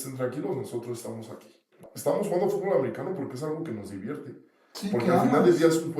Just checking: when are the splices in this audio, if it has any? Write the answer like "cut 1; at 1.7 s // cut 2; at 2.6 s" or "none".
cut 1; at 1.9 s

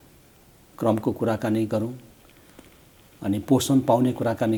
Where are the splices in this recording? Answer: none

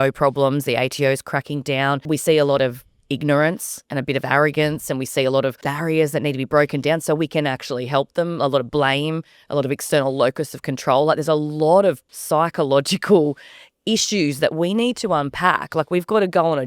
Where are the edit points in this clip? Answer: cut 1; at 2.0 s // cut 2; at 5.6 s // cut 3; at 12.1 s

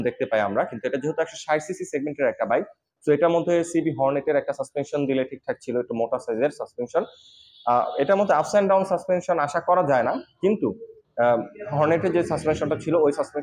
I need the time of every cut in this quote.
none

